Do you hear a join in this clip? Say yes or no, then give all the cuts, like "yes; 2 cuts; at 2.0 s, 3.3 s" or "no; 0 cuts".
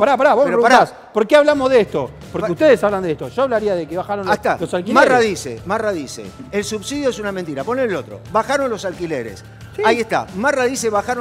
no; 0 cuts